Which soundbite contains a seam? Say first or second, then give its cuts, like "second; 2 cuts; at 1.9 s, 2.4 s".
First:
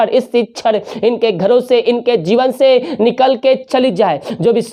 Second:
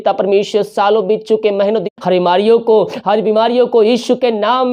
second; 1 cut; at 1.8 s